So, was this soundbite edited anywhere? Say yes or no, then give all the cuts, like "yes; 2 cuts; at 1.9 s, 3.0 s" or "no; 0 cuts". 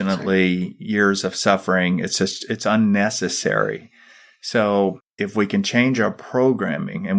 no; 0 cuts